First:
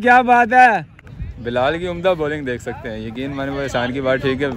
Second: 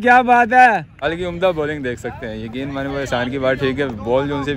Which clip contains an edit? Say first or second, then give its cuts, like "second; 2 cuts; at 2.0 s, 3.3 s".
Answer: second; 1 cut; at 1.0 s